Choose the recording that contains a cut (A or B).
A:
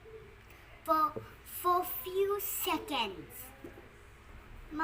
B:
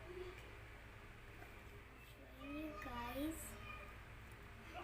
B